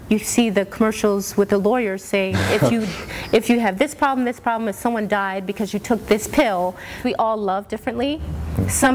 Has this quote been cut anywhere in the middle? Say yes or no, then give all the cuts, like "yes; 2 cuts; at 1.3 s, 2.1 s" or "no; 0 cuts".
yes; 1 cut; at 7.0 s